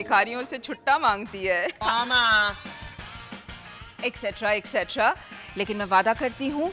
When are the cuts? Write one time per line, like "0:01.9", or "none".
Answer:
0:01.8